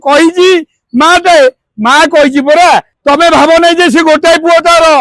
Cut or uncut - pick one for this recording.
cut